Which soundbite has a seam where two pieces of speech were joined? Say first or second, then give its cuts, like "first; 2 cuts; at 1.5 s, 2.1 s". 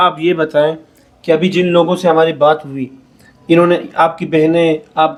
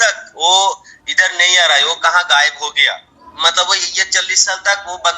second; 1 cut; at 3.1 s